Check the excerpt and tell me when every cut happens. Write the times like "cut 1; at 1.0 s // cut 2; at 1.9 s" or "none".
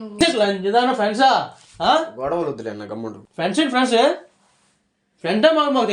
none